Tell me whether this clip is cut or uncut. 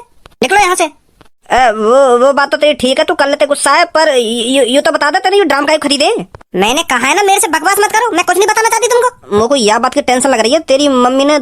cut